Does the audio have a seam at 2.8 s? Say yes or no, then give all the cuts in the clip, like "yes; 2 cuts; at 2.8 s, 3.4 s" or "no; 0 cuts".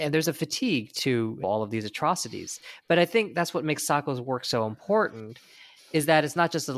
no; 1 cut; at 1.4 s